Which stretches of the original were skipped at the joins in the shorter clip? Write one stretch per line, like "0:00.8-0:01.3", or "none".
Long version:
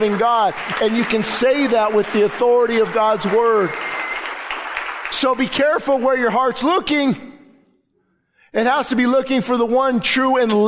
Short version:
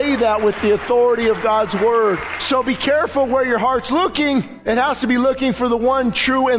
0:03.8-0:05.0
0:07.3-0:08.4